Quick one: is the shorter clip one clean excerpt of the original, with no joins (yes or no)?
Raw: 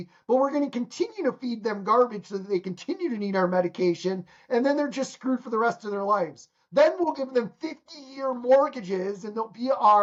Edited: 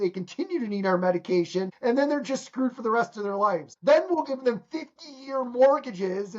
no